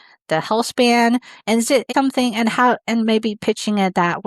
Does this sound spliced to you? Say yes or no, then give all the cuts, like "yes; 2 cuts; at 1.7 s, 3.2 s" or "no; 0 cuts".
yes; 1 cut; at 1.9 s